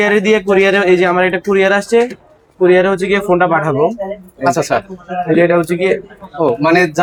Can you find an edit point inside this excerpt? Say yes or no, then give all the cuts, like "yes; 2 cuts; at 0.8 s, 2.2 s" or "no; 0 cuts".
no; 0 cuts